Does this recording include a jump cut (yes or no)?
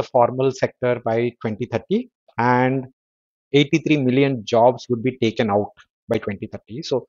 no